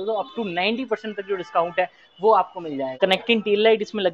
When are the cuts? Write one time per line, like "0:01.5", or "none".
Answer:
0:02.9